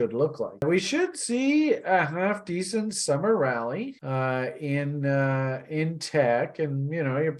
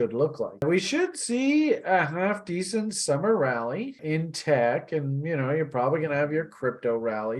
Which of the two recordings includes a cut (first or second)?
second